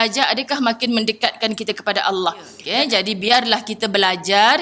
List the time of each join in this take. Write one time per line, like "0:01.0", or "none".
0:02.6